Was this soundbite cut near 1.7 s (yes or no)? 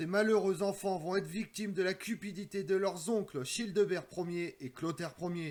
no